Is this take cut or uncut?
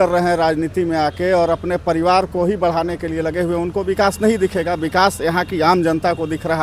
uncut